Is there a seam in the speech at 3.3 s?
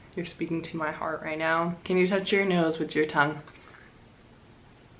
no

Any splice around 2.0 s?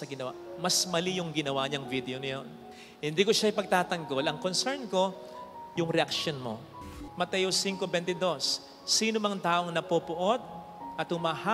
no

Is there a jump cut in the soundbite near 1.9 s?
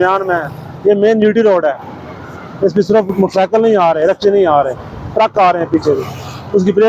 no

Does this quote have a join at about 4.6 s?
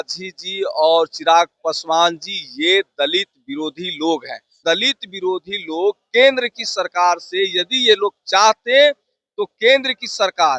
yes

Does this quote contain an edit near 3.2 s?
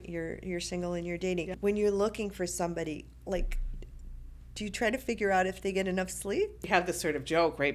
no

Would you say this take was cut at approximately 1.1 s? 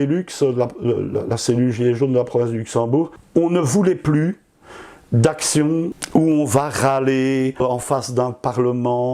no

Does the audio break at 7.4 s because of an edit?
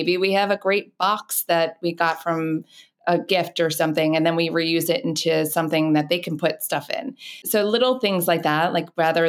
yes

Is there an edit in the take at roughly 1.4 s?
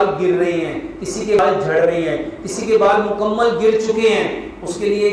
yes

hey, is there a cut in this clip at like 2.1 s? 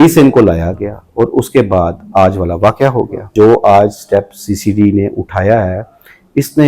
no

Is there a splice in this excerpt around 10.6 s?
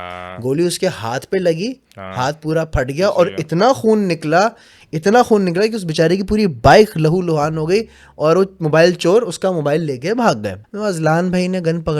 yes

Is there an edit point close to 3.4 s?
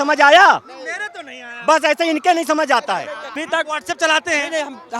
yes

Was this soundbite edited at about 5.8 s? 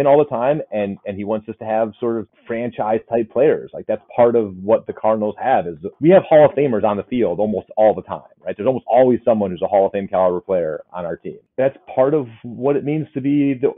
yes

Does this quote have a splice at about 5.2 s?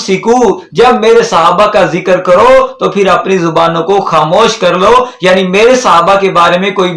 no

